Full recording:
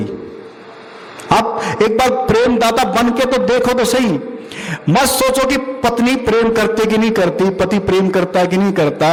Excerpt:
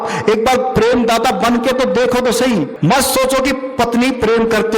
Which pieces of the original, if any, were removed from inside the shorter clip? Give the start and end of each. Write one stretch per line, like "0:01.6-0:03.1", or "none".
0:04.3-0:04.8